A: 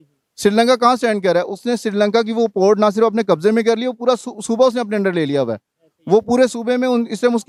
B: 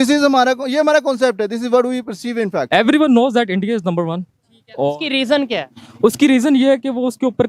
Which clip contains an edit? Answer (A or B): B